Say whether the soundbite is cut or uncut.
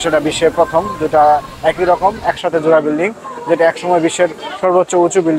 uncut